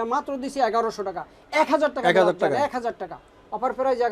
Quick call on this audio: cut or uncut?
uncut